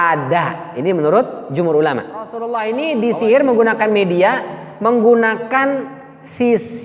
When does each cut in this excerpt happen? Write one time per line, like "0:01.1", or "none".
0:02.5

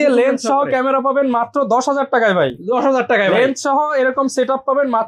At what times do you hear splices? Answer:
none

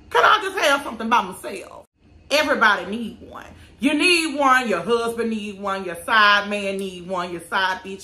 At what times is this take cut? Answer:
0:01.7

